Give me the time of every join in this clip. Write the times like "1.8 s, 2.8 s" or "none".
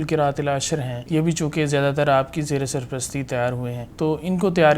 1.0 s, 3.8 s